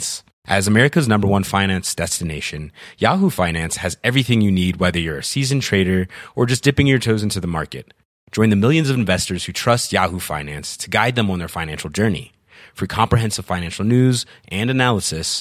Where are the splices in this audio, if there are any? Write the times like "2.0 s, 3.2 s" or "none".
none